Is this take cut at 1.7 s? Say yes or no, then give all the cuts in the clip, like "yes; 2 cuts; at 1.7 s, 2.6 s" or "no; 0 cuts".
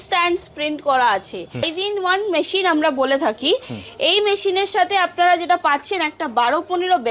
yes; 1 cut; at 1.7 s